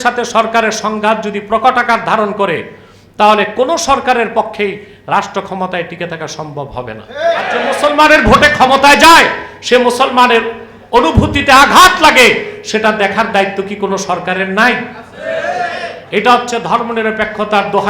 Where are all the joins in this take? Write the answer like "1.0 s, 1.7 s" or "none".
7.7 s